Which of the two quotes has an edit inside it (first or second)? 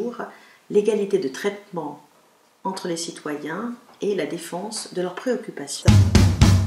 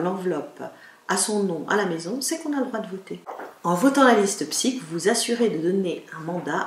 first